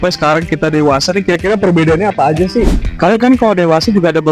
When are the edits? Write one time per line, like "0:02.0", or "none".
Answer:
0:02.8